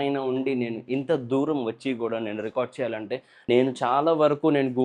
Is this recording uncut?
no; 1 cut; at 3.3 s

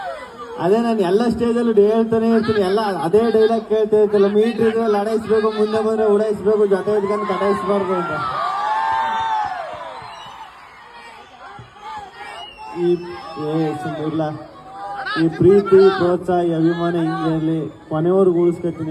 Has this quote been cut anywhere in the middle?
no; 0 cuts

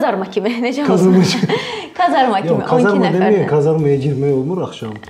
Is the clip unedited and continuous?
yes; 0 cuts

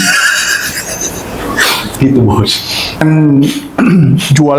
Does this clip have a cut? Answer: yes; 1 cut; at 3.0 s

